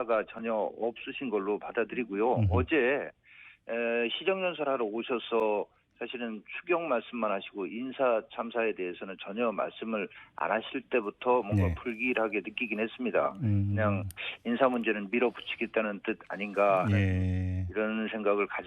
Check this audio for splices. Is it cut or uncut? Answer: cut